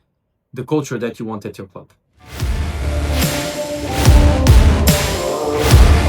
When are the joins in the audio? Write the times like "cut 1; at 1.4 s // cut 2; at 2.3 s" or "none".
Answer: cut 1; at 2.5 s